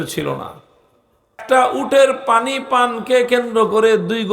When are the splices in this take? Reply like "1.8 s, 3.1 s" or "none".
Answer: 1.4 s

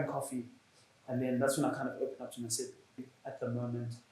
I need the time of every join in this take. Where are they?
3.0 s

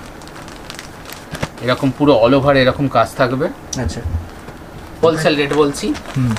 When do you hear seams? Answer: 4.9 s

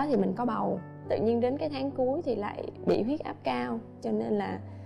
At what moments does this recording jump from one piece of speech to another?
0.9 s

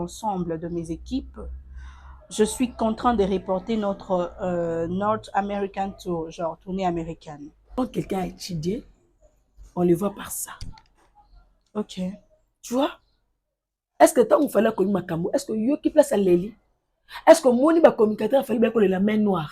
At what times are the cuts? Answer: 7.7 s

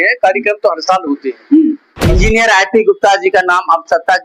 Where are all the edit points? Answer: 2.1 s

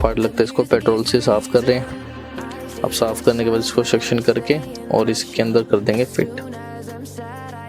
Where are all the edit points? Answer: none

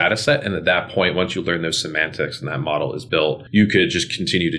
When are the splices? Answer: 3.1 s

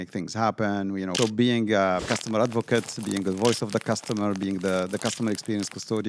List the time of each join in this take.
1.1 s, 2.1 s

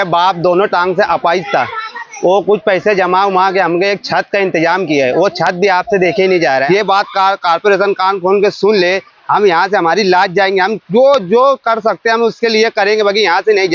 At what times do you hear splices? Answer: 6.6 s

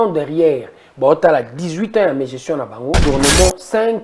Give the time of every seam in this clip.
3.0 s

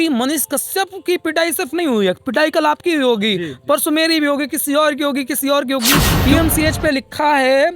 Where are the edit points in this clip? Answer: 6.1 s

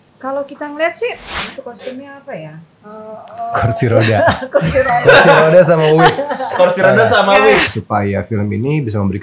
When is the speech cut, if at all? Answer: 1.2 s, 7.7 s

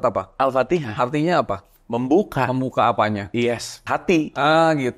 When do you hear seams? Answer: 3.8 s

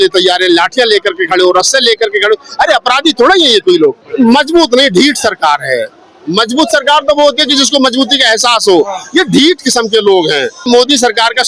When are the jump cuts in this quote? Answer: 4.0 s, 10.6 s

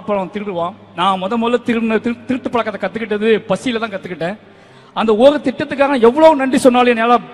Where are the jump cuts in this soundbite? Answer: 4.7 s

